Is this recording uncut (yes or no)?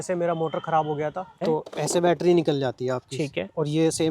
no